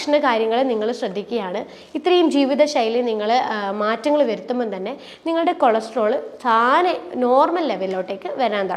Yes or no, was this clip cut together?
no